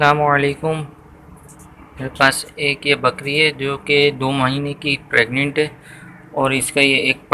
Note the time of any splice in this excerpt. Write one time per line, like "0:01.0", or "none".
none